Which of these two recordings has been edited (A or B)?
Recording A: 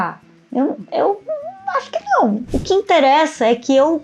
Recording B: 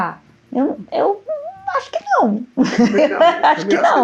A